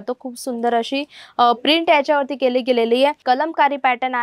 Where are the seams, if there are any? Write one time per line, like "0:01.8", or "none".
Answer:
0:03.2